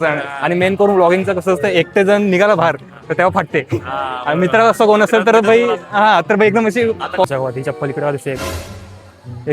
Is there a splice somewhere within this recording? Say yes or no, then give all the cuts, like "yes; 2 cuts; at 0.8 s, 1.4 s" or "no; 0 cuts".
yes; 1 cut; at 7.2 s